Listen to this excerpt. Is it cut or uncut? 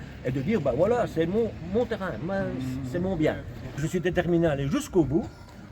cut